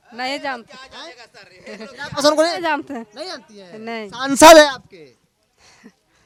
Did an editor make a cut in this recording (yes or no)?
no